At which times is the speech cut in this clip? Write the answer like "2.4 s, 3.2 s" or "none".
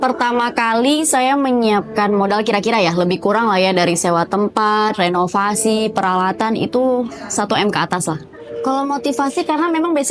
8.4 s